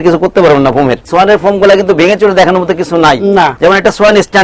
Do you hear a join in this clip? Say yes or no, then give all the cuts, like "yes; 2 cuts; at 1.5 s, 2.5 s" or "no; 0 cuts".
yes; 2 cuts; at 1.1 s, 3.5 s